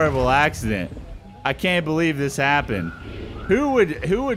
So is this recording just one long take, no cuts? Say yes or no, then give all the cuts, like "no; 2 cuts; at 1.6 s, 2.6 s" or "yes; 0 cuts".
yes; 0 cuts